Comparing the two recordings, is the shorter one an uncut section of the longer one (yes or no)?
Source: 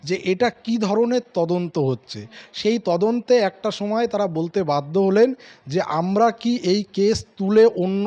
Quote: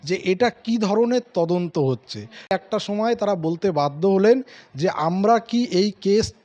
no